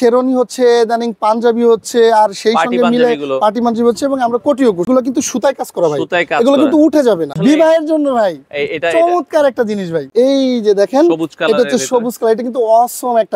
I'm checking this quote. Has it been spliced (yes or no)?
yes